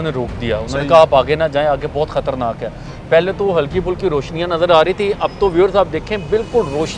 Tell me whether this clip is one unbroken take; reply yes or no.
yes